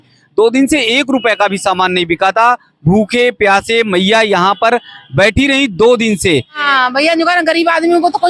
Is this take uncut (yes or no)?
no